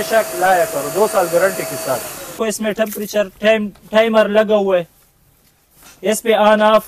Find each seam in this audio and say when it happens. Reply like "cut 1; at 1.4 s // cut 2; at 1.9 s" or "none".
cut 1; at 2.4 s